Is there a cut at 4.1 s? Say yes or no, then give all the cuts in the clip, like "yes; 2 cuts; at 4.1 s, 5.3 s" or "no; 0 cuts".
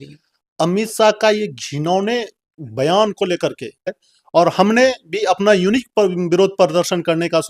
yes; 1 cut; at 4.1 s